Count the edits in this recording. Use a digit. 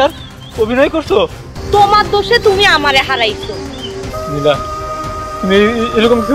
1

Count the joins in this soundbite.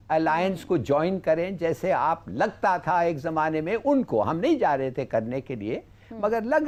0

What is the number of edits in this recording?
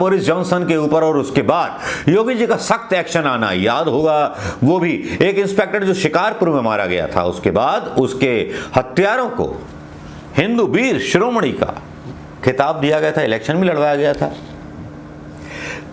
0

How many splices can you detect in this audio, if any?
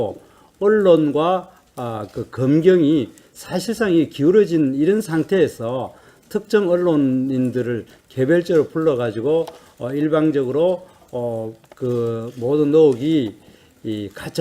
1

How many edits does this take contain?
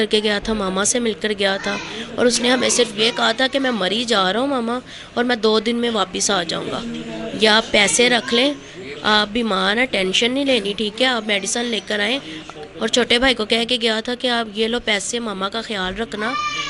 0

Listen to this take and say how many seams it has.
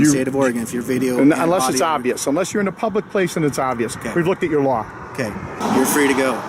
1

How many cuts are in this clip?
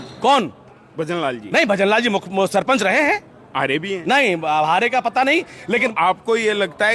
1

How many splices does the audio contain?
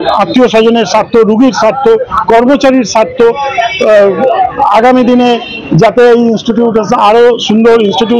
0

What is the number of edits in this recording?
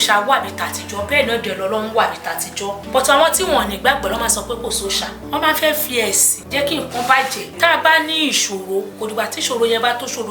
5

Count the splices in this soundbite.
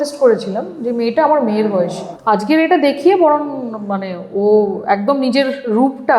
1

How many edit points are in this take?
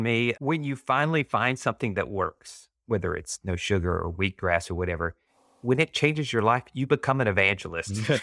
1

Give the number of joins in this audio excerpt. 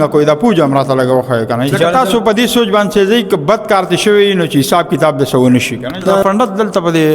2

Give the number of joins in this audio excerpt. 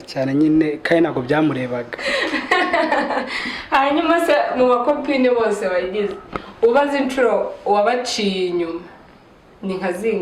1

